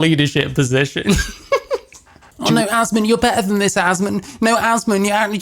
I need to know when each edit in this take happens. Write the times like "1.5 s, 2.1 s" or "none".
2.2 s